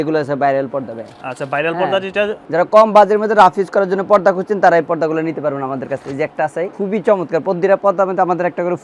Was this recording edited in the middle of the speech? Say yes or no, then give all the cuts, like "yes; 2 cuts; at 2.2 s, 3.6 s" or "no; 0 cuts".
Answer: yes; 2 cuts; at 2.4 s, 6.7 s